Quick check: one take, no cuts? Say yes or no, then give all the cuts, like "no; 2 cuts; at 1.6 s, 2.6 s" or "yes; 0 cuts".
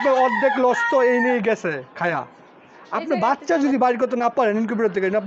yes; 0 cuts